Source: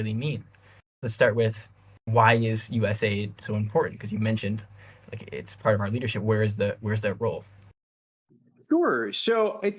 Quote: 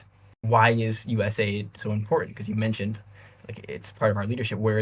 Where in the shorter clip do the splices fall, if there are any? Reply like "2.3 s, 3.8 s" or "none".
none